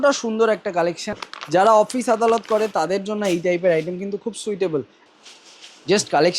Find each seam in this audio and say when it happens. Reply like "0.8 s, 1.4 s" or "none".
1.2 s, 5.0 s